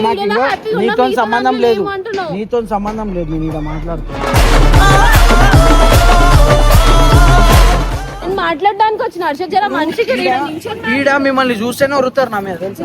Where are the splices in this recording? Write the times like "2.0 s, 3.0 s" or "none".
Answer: 8.1 s